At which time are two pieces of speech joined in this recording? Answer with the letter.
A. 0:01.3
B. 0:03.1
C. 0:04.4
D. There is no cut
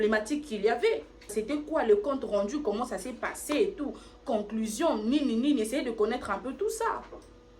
A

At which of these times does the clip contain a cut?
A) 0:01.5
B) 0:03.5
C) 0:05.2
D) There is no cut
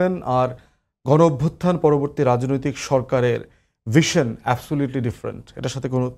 D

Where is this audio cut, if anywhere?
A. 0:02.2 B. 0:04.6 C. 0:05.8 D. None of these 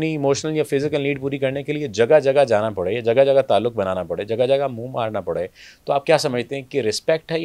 D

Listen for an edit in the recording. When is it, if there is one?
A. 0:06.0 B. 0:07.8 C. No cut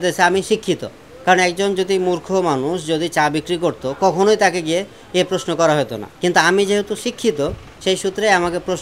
A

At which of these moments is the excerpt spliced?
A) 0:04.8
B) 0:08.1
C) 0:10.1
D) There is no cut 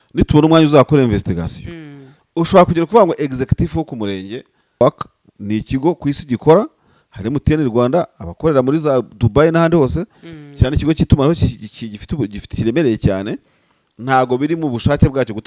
A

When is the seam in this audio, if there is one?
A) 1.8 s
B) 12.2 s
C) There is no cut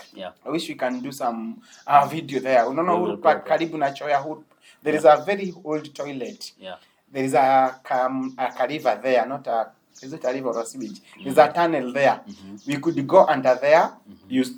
C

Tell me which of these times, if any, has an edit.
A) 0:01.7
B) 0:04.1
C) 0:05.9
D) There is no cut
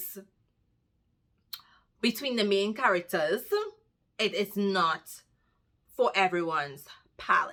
D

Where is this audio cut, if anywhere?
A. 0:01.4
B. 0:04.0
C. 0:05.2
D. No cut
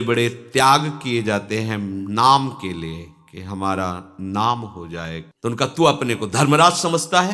C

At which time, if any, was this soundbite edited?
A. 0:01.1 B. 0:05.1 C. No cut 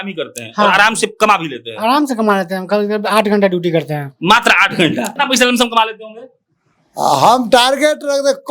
B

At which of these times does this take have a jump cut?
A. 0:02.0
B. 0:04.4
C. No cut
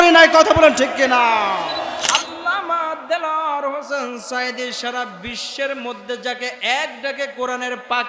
A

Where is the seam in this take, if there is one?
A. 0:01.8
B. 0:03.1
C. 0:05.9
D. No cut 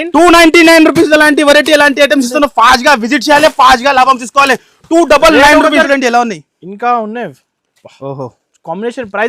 C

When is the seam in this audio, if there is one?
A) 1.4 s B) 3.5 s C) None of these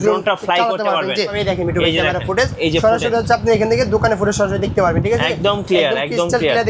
A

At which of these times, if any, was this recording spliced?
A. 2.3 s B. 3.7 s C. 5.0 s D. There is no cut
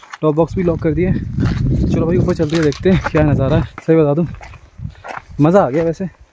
B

